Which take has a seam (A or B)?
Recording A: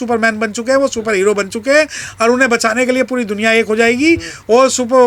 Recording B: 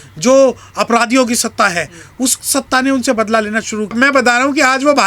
B